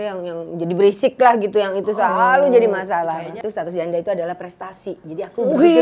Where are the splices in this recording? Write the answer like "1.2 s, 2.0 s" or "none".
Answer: 3.1 s